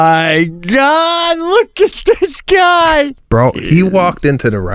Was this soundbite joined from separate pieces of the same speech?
yes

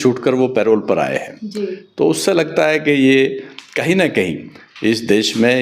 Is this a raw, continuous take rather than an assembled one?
yes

